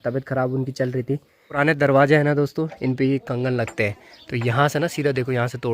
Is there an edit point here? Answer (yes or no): yes